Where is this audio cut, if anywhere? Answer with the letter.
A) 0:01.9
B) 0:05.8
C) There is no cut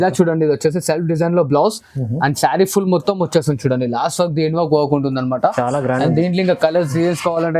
C